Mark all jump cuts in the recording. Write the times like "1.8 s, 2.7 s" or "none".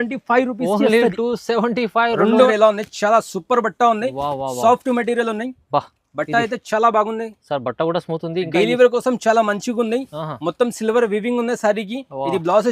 2.5 s